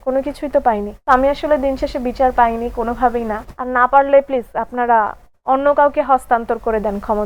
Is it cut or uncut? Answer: cut